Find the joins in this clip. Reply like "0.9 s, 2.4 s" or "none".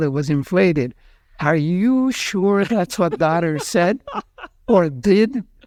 none